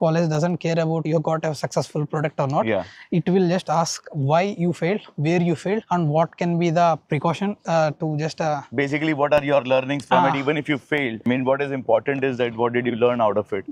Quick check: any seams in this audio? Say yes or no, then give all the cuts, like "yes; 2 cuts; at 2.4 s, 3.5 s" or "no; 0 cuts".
no; 0 cuts